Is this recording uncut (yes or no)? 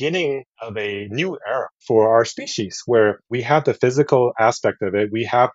no